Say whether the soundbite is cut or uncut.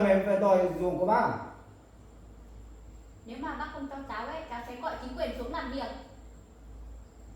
uncut